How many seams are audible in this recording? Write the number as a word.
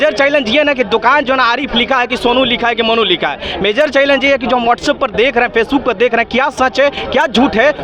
zero